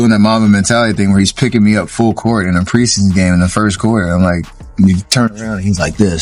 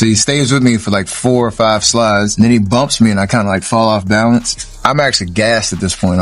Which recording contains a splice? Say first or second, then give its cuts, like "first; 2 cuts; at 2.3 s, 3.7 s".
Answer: second; 2 cuts; at 2.3 s, 4.8 s